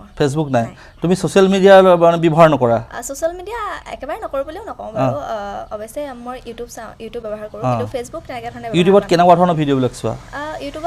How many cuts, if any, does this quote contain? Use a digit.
0